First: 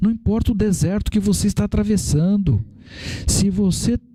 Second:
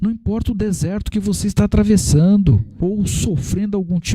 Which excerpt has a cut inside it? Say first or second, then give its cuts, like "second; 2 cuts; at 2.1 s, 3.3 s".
second; 1 cut; at 2.7 s